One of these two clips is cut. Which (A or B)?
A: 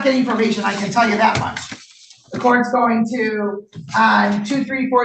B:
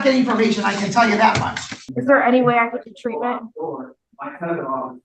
B